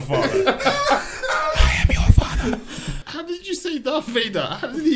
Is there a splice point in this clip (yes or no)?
yes